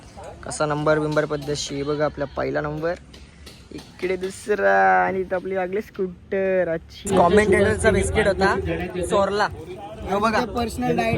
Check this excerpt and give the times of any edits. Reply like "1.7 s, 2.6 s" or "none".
7.0 s